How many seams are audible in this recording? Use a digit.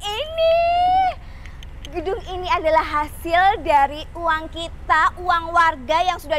0